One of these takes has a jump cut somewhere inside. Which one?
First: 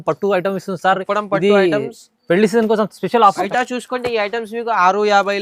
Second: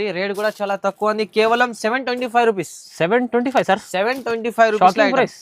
first; 1 cut; at 3.5 s

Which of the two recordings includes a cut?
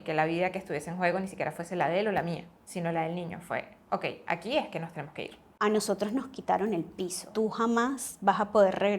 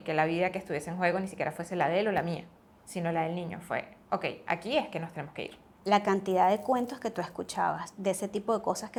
first; 3 cuts; at 2.6 s, 5.4 s, 7.2 s

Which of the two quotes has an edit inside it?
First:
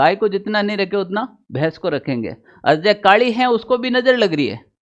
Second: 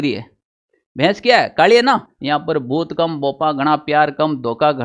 second; 1 cut; at 2.1 s

